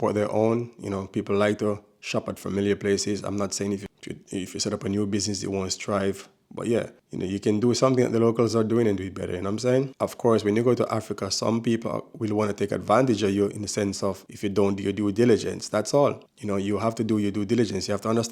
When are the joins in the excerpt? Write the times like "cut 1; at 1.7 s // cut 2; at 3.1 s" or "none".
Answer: cut 1; at 3.9 s // cut 2; at 9.9 s